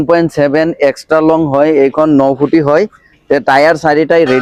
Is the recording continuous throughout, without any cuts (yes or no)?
yes